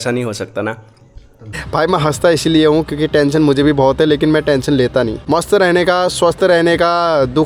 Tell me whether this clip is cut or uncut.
cut